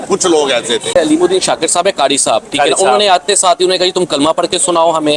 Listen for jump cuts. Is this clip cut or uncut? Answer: cut